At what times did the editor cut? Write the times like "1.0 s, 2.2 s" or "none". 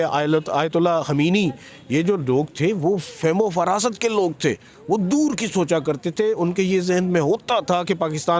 none